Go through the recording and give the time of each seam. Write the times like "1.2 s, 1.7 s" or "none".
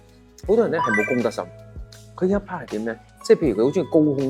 none